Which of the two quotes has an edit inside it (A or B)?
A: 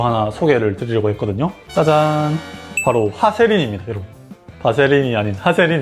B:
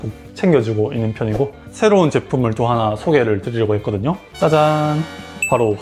B